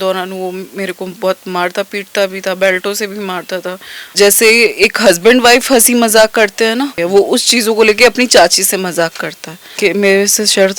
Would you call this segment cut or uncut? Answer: cut